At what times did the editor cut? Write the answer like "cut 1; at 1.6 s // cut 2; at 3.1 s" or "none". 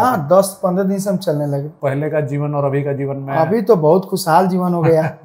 cut 1; at 1.7 s